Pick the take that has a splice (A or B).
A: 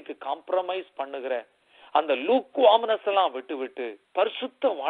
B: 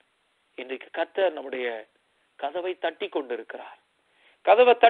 A